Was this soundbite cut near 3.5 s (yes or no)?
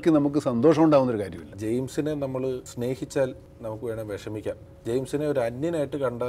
yes